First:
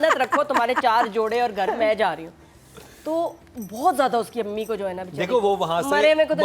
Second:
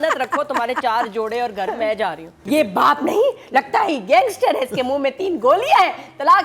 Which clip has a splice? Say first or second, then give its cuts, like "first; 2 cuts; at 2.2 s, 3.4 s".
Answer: second; 1 cut; at 2.4 s